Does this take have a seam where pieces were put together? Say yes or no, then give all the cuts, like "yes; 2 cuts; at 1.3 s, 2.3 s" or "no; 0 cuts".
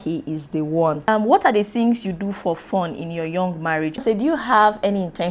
yes; 2 cuts; at 1.1 s, 4.0 s